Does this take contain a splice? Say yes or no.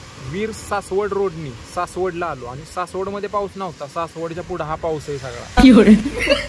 yes